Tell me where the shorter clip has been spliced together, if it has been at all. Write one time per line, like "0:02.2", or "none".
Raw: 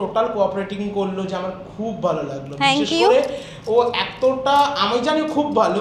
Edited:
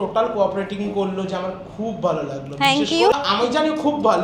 0:03.1